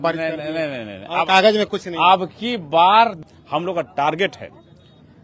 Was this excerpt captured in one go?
no; 1 cut; at 3.3 s

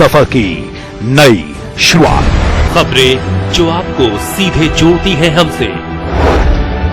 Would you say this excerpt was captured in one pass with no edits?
no; 1 cut; at 2.0 s

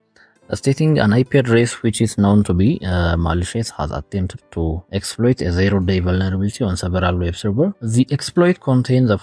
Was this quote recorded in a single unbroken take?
no; 2 cuts; at 4.8 s, 7.8 s

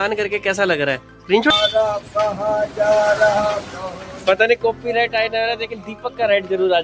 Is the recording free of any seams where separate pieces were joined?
no; 1 cut; at 1.6 s

